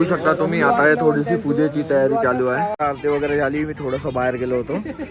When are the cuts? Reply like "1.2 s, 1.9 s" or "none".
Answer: 2.7 s